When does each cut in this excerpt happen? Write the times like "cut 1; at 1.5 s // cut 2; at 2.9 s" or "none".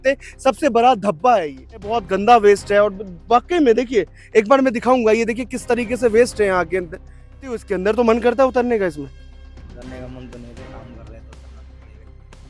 cut 1; at 1.9 s // cut 2; at 7.5 s